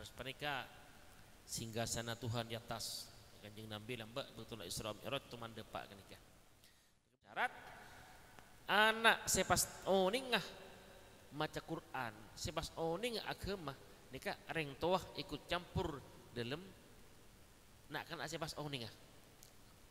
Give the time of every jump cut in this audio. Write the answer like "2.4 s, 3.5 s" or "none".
7.1 s